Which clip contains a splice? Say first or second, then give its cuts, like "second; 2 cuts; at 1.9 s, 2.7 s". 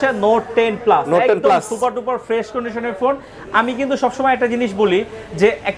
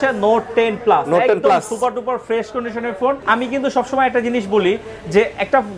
second; 1 cut; at 3.2 s